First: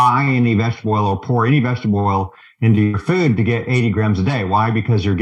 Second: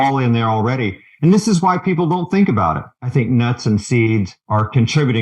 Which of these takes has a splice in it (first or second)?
second